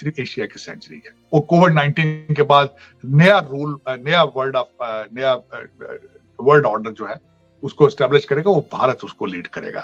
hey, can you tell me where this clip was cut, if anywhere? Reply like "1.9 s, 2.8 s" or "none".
none